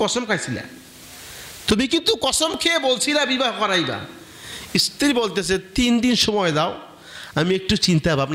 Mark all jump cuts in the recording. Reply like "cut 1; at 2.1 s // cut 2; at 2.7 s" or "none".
none

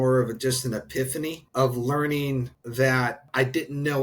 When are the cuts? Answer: cut 1; at 1.4 s // cut 2; at 2.6 s // cut 3; at 3.3 s

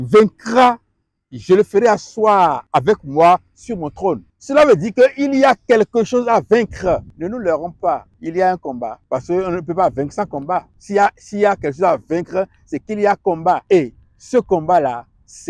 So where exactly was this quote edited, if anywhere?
cut 1; at 2.6 s // cut 2; at 4.3 s // cut 3; at 7.1 s // cut 4; at 8.1 s // cut 5; at 9.0 s // cut 6; at 10.8 s // cut 7; at 13.6 s

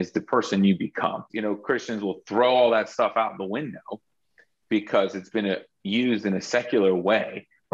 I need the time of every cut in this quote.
cut 1; at 1.3 s

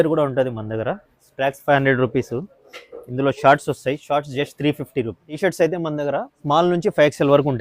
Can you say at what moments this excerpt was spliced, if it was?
cut 1; at 1.3 s // cut 2; at 5.3 s // cut 3; at 6.3 s

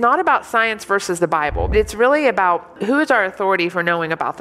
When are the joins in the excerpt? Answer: cut 1; at 1.7 s // cut 2; at 2.8 s

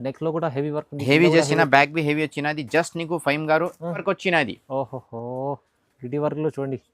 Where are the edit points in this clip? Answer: cut 1; at 4.0 s

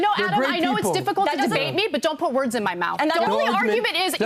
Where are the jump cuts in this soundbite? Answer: cut 1; at 3.2 s

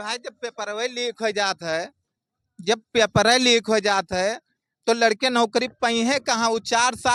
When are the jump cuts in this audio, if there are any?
none

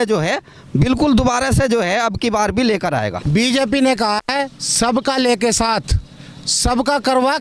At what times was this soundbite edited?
cut 1; at 3.2 s

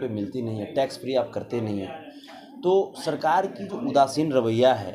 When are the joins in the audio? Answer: none

